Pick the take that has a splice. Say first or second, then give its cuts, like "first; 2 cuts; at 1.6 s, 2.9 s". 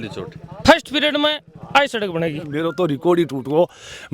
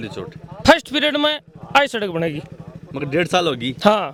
first; 1 cut; at 2.6 s